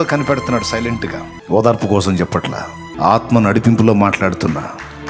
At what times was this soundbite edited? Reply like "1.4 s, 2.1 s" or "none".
1.3 s, 2.8 s